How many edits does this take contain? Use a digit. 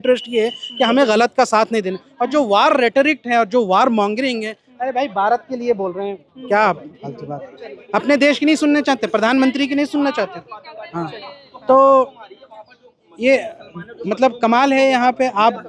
0